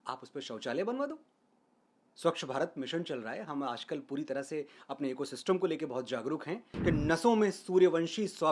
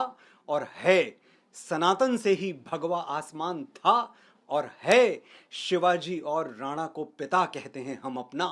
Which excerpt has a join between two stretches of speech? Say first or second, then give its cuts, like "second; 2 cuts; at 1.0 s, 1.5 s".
first; 1 cut; at 6.7 s